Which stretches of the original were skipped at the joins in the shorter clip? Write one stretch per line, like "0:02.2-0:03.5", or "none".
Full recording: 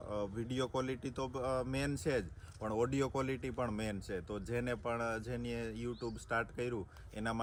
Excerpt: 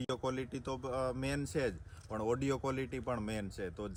none